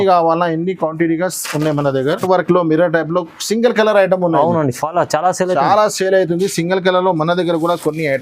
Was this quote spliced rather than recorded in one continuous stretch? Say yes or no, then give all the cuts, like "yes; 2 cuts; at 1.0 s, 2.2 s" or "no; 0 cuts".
yes; 1 cut; at 2.2 s